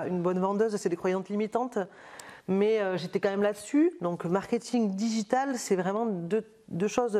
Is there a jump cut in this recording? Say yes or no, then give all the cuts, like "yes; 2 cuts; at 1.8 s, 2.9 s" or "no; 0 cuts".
no; 0 cuts